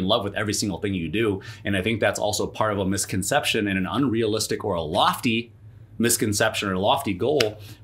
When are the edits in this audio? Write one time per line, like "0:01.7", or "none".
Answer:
none